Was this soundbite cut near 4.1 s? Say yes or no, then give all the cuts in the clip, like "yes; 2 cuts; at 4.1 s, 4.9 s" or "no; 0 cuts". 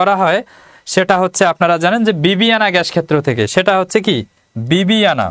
no; 0 cuts